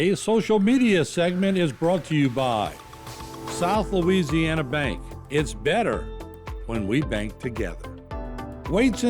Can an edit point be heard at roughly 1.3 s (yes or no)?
no